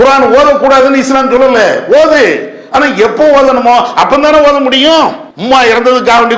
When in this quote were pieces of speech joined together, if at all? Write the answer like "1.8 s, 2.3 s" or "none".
5.3 s